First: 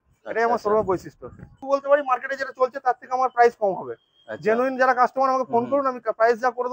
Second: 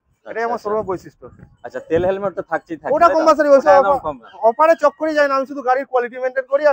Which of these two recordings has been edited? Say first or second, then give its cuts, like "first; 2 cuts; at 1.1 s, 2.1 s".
first; 1 cut; at 1.6 s